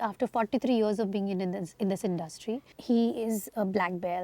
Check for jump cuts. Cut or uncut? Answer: cut